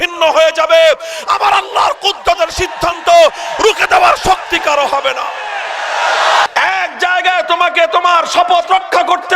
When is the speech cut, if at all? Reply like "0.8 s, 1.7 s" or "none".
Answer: 6.5 s

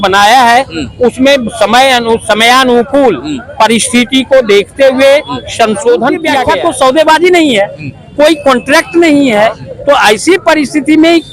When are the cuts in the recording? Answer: 6.4 s

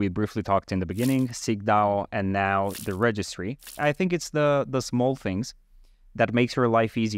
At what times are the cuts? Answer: 3.7 s

